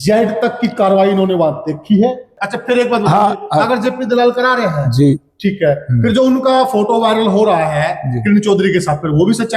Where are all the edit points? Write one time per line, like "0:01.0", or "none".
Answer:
0:02.4

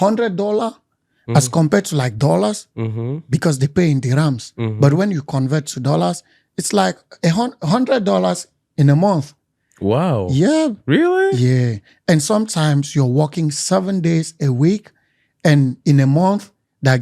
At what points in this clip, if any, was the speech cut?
none

